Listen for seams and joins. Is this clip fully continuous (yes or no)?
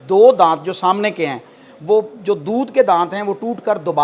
yes